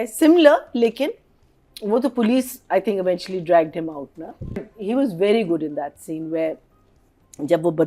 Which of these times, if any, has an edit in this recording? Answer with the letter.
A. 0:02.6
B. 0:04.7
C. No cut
B